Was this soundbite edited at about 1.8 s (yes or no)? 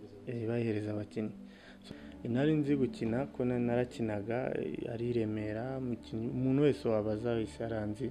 yes